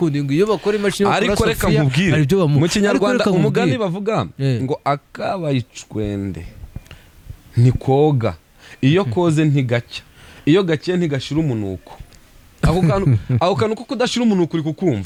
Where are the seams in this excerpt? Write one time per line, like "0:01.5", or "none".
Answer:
none